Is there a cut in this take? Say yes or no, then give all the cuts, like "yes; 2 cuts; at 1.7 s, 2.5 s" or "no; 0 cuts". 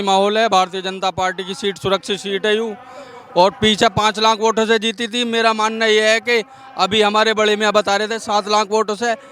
no; 0 cuts